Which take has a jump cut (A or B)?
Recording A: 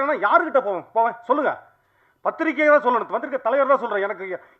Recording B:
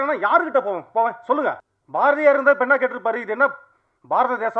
B